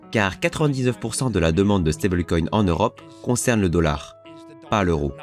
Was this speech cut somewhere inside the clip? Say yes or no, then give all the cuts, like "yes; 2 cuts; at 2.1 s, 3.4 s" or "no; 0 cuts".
no; 0 cuts